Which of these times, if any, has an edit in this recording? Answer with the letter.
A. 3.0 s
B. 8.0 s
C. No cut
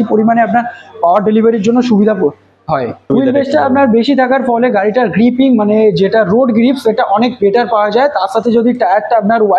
A